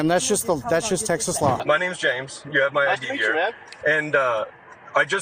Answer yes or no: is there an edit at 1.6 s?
yes